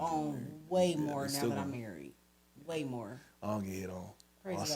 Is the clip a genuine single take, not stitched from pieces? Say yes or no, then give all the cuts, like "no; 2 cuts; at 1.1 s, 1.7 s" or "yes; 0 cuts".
yes; 0 cuts